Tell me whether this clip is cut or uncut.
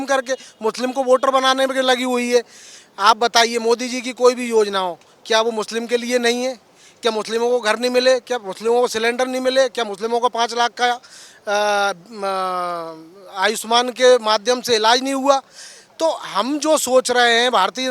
uncut